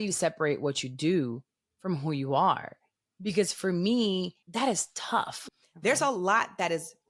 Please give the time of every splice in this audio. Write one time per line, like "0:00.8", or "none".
0:04.4
0:05.4

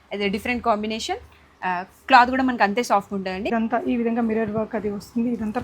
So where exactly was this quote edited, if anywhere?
0:03.5

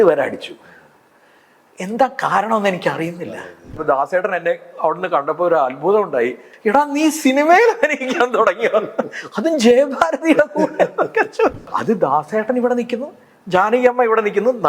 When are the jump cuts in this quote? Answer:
0:03.8
0:06.5
0:11.7

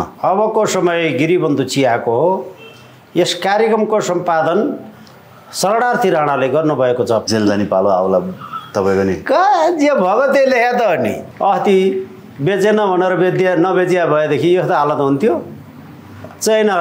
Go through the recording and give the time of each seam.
0:07.2
0:11.3

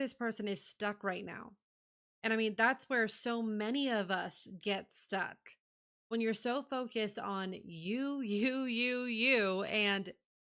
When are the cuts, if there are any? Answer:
none

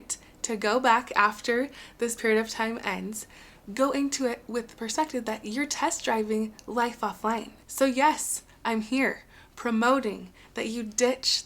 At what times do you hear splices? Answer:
0:07.6

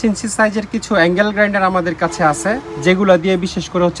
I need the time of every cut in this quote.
none

